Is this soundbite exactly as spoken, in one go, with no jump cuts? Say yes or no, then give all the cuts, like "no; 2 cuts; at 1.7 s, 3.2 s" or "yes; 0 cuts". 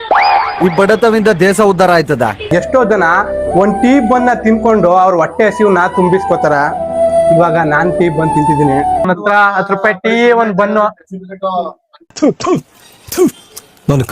no; 2 cuts; at 2.5 s, 9.0 s